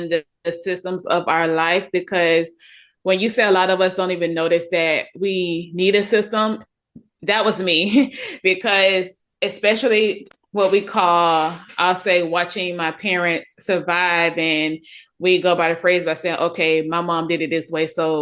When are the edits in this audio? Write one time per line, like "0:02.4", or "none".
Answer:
0:10.2

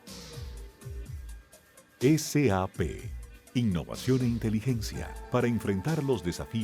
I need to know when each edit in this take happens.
0:01.1

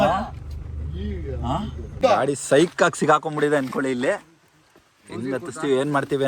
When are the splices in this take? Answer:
0:01.9

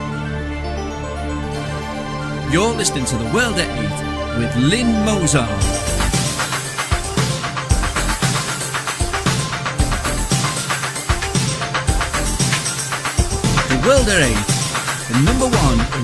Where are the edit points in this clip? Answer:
none

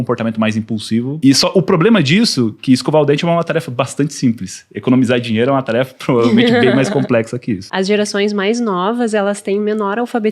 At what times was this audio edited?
0:01.2
0:07.7

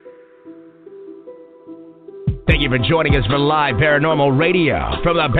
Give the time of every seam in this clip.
0:00.9

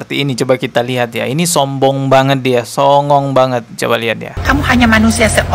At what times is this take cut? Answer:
0:04.3

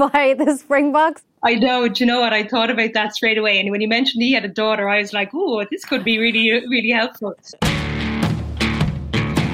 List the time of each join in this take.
0:01.2
0:07.5

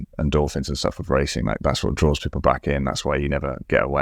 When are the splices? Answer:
0:01.6

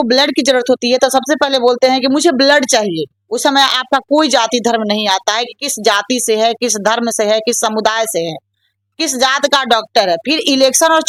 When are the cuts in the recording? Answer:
none

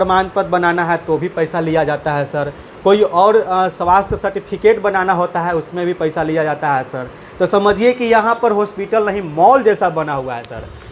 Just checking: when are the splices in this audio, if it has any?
none

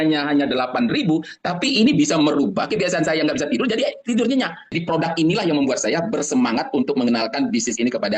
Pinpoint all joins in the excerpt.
0:04.6

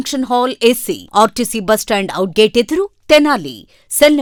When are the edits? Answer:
none

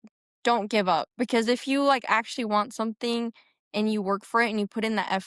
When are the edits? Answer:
none

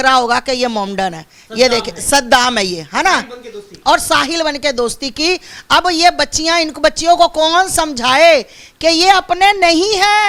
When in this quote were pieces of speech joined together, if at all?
none

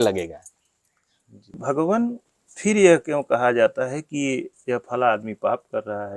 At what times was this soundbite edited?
0:01.6

